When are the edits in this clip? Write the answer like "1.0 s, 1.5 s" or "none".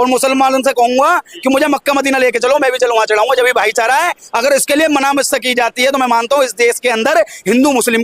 none